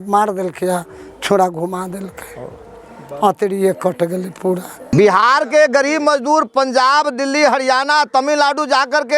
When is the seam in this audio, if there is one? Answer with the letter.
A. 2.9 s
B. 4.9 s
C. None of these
B